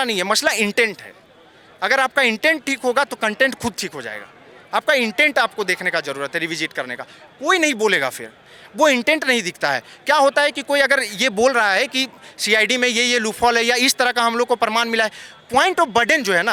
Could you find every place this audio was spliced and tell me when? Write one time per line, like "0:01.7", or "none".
none